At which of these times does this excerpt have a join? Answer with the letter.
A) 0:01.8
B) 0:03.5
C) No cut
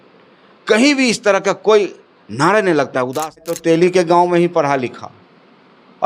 B